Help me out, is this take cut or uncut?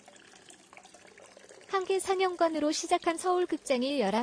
cut